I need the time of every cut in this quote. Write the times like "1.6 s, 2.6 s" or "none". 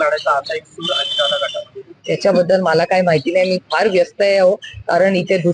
none